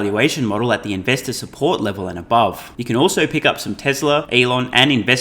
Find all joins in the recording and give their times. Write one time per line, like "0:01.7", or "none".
0:02.7
0:04.3

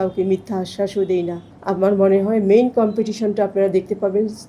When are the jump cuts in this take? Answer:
0:01.5

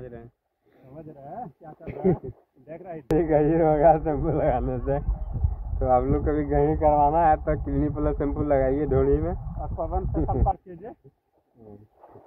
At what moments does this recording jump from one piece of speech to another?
0:03.1

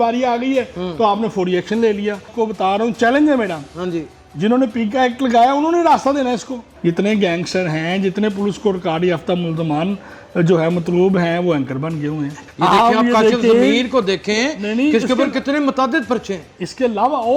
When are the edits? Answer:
0:02.3
0:06.6
0:12.4

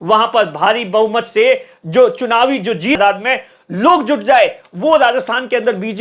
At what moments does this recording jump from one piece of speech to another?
0:03.0

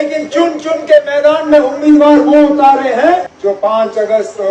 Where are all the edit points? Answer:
0:03.3

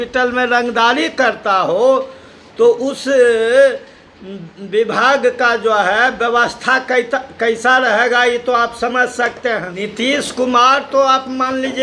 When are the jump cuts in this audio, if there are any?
0:09.8

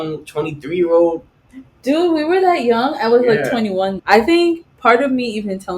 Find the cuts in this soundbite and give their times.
0:04.0

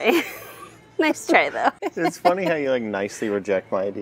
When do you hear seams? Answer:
0:01.8

